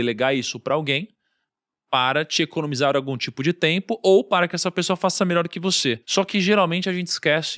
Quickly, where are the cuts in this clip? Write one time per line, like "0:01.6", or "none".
0:06.0